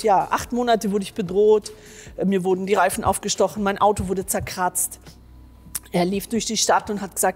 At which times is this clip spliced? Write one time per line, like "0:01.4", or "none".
none

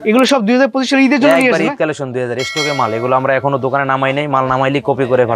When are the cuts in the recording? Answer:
none

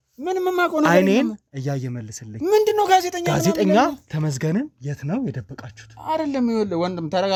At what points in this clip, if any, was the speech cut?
none

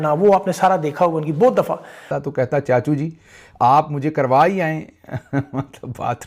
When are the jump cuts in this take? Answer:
0:02.1

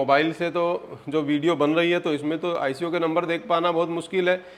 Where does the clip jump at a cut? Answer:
none

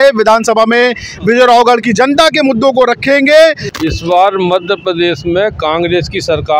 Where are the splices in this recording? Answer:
0:03.7

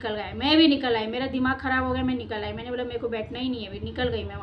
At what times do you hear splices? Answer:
none

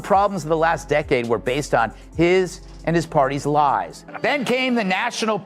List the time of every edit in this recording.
0:04.0

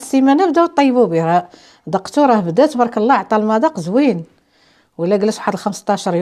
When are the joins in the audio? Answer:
none

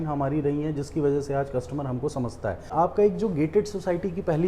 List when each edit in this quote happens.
0:02.7

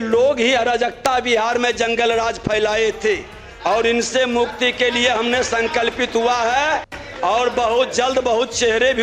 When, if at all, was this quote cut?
none

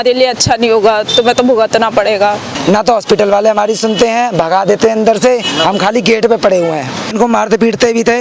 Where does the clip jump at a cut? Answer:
0:02.5
0:07.1

